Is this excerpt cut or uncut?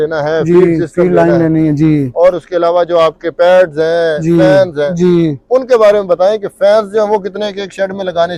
uncut